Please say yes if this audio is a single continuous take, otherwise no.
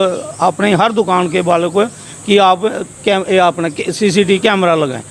yes